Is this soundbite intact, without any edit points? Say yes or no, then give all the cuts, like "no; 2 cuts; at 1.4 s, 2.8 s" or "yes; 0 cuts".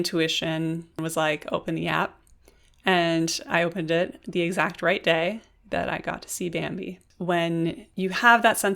no; 3 cuts; at 1.0 s, 7.0 s, 7.8 s